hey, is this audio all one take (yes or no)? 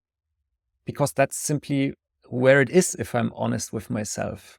yes